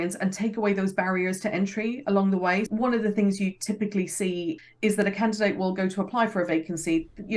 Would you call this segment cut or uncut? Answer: cut